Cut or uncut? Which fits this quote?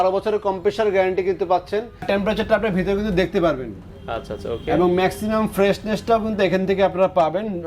cut